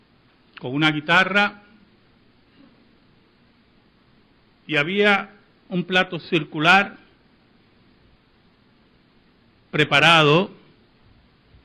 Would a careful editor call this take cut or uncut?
cut